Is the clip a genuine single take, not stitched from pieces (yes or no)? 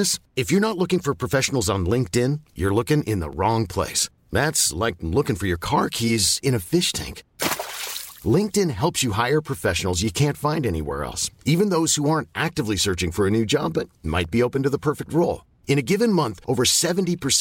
yes